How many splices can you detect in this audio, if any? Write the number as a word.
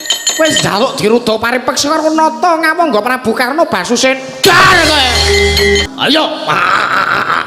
one